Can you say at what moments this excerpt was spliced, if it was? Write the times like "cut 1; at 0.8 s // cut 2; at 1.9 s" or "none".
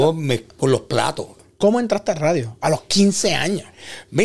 cut 1; at 1.4 s